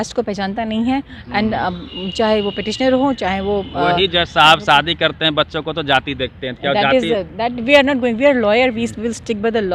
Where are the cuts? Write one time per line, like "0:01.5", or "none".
none